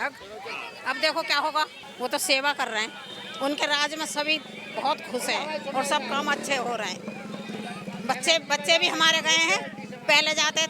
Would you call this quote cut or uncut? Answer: cut